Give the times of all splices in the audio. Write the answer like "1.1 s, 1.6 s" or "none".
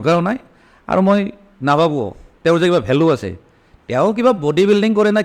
none